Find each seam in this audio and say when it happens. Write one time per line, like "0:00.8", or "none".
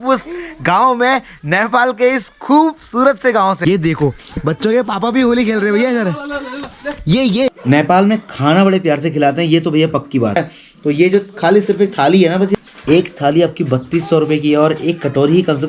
0:03.6
0:07.5
0:10.4
0:12.5